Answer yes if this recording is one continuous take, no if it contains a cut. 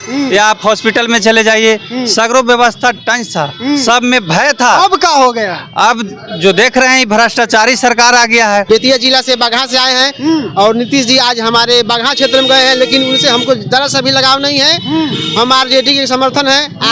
no